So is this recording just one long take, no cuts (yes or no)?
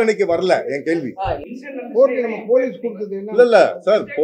no